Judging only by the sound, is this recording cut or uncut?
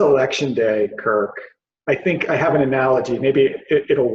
uncut